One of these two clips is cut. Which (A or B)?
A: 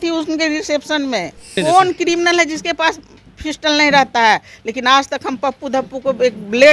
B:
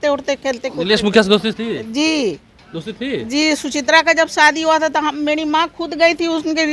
A